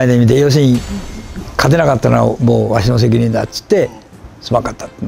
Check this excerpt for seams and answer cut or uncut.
uncut